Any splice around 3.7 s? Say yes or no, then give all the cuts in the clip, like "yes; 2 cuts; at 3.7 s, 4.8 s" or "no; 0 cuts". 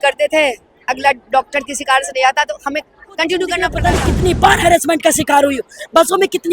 yes; 1 cut; at 3.7 s